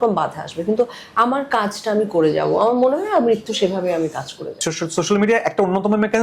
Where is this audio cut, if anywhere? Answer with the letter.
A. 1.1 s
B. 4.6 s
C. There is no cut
B